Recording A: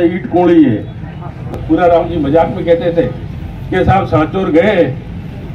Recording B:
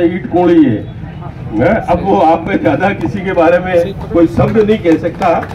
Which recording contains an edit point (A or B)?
A